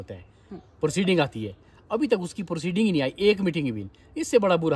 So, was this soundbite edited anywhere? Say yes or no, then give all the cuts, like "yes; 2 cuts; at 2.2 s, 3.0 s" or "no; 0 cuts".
no; 0 cuts